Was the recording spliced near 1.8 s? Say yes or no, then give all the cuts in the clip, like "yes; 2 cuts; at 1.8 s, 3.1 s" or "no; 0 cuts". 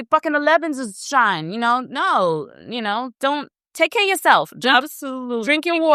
no; 0 cuts